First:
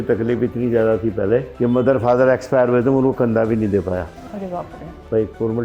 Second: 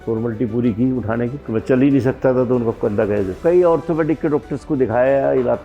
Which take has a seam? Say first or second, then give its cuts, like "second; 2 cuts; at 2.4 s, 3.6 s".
second; 2 cuts; at 1.4 s, 3.3 s